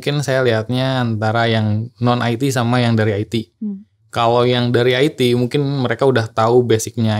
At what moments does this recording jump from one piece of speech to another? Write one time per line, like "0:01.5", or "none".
none